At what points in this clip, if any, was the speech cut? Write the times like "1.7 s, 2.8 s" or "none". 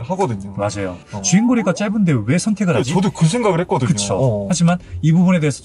1.0 s, 4.5 s